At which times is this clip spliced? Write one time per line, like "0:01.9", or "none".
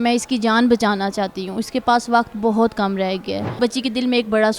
0:03.6

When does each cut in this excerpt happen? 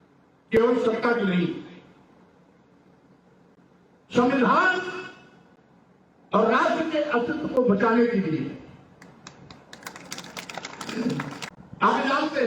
0:11.5

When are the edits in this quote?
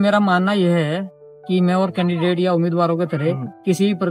none

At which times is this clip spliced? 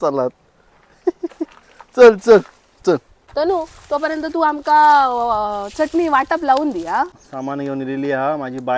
0:03.2
0:07.2

